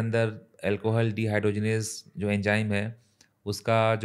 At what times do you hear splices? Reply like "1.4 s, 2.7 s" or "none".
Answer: none